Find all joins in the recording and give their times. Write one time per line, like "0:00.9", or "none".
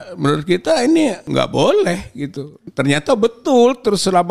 0:01.2
0:02.6